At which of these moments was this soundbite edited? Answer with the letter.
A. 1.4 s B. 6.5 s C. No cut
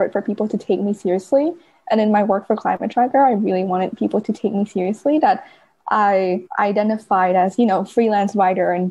B